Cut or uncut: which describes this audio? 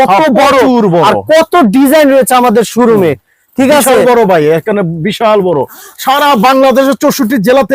uncut